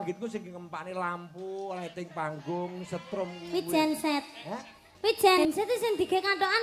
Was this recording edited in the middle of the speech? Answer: yes; 1 cut; at 5.4 s

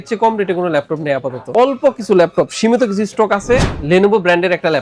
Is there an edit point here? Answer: yes; 2 cuts; at 1.5 s, 3.7 s

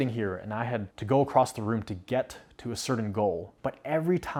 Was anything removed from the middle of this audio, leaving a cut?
no; 0 cuts

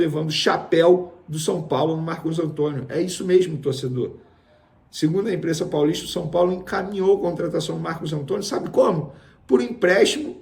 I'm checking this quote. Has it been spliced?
no; 0 cuts

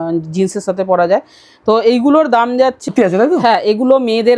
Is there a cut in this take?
yes; 1 cut; at 2.8 s

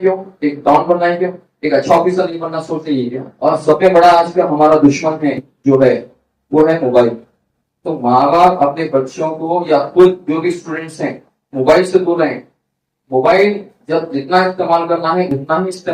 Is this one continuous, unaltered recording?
no; 1 cut; at 3.2 s

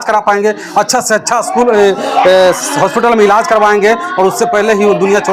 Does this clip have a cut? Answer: no; 0 cuts

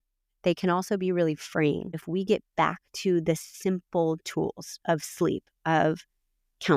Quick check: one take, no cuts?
no; 1 cut; at 2.0 s

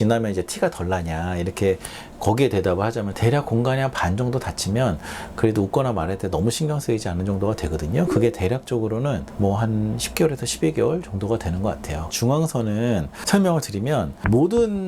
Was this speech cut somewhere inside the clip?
yes; 2 cuts; at 3.1 s, 12.0 s

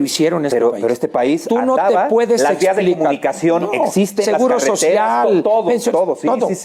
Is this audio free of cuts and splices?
yes; 0 cuts

